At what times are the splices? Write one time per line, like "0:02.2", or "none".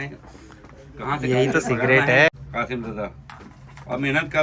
0:02.3